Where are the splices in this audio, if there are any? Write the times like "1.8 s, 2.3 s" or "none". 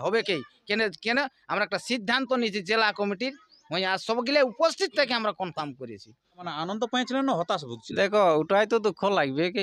6.4 s